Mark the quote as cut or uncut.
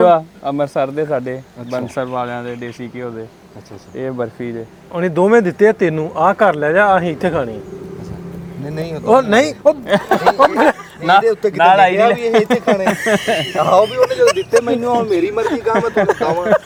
uncut